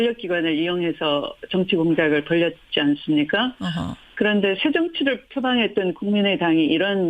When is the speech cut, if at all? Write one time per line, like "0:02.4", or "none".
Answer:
0:02.9